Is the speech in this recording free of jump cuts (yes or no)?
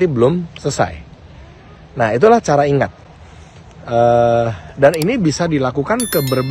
yes